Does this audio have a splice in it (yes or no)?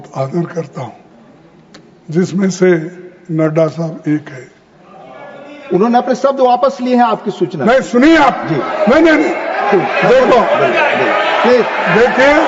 no